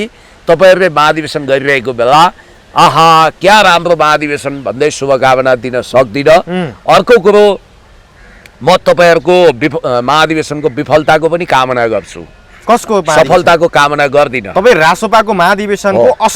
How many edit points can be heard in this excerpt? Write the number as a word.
zero